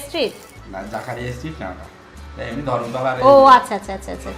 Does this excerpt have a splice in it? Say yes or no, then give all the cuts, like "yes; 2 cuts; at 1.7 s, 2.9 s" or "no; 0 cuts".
no; 0 cuts